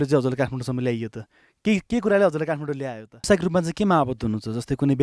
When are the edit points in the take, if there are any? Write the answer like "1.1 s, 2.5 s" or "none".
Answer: 3.3 s